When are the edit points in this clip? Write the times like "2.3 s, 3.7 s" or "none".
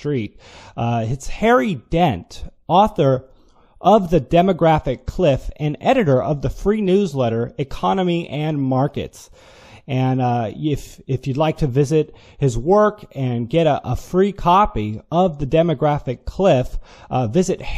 none